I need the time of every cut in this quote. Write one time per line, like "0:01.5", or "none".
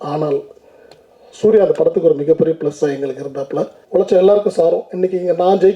0:03.8